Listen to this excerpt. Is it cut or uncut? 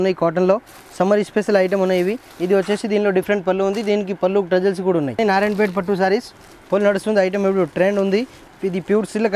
cut